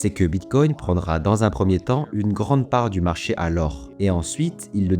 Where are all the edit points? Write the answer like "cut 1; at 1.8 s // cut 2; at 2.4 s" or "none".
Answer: cut 1; at 3.8 s